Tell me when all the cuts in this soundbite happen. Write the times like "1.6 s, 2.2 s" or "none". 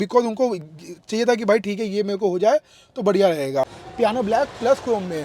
3.8 s